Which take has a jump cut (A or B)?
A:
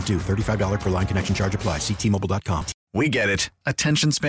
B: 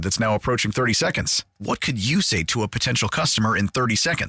A